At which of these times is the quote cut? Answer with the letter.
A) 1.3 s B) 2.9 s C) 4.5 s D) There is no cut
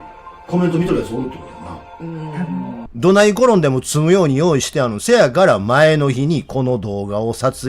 B